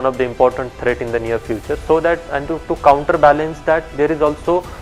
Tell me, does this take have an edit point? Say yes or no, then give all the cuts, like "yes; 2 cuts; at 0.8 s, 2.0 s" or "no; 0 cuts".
no; 0 cuts